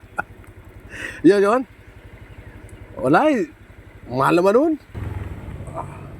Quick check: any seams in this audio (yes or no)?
yes